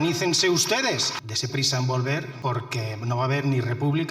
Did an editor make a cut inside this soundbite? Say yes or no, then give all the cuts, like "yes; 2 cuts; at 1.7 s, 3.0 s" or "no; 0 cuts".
yes; 2 cuts; at 1.2 s, 2.3 s